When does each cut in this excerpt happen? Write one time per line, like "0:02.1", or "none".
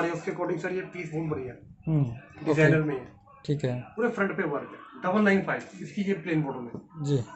none